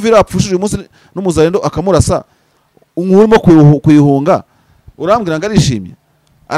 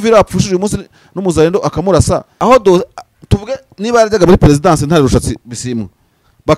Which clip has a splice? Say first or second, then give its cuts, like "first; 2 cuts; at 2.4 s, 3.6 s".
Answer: second; 1 cut; at 2.3 s